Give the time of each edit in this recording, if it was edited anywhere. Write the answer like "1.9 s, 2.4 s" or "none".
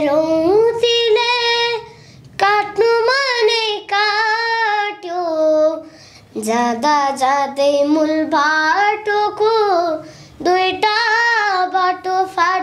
none